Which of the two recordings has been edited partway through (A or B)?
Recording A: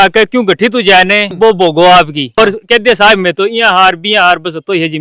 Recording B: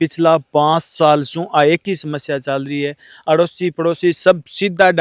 A